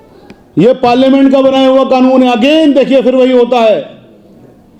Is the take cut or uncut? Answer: uncut